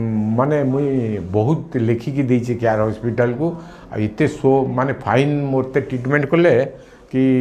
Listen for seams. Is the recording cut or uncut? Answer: uncut